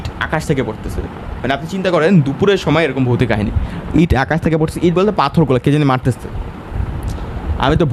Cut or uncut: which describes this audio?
uncut